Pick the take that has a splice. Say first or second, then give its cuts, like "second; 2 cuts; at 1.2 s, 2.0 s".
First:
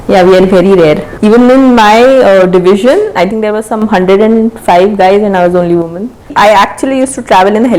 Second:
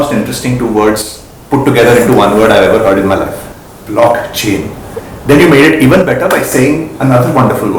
first; 2 cuts; at 1.1 s, 6.3 s